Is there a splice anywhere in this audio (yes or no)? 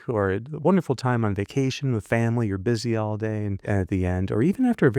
yes